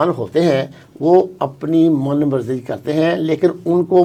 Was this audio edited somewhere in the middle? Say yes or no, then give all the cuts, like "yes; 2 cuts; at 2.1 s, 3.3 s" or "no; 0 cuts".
no; 0 cuts